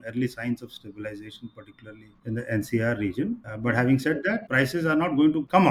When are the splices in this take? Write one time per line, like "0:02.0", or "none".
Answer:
none